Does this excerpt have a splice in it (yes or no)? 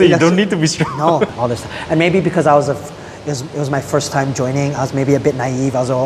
yes